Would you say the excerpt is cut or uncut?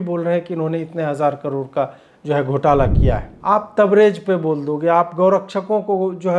cut